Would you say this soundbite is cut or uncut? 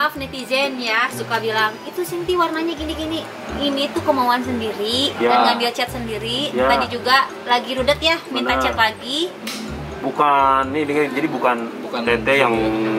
uncut